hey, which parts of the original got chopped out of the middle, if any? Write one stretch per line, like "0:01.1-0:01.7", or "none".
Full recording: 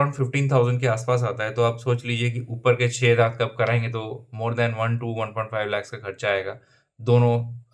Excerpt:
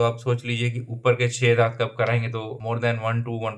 0:04.1-0:04.3